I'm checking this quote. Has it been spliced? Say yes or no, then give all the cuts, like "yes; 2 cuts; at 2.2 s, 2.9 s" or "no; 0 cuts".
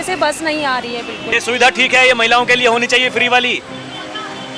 yes; 1 cut; at 1.3 s